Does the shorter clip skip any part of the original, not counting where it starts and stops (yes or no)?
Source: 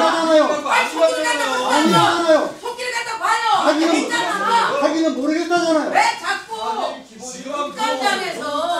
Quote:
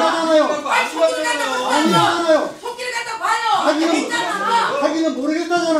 no